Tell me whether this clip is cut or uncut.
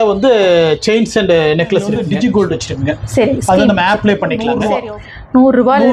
cut